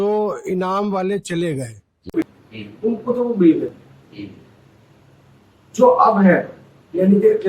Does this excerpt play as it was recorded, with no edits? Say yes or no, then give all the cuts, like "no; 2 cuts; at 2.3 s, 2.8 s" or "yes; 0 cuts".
no; 1 cut; at 2.3 s